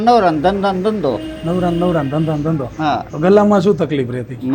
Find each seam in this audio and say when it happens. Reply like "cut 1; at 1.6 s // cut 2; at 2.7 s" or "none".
none